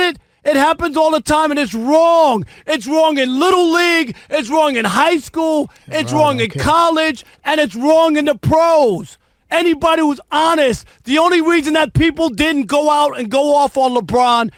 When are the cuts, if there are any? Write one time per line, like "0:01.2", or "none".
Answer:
none